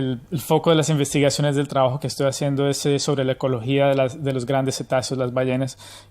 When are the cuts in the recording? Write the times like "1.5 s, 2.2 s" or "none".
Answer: 4.5 s